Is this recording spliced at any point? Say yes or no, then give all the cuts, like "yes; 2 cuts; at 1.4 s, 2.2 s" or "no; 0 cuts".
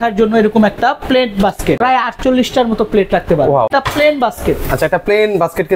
yes; 2 cuts; at 1.8 s, 3.7 s